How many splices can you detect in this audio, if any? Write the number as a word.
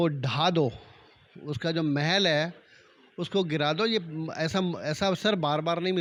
zero